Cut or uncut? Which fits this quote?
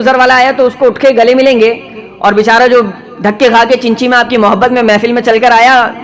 uncut